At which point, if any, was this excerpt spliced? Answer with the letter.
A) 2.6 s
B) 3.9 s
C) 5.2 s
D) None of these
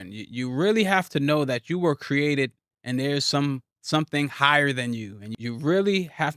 C